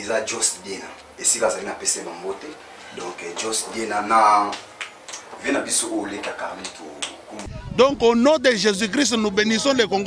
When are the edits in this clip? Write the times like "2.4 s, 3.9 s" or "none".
7.5 s